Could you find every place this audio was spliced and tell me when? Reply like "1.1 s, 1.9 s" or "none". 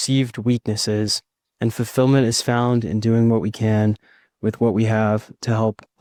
none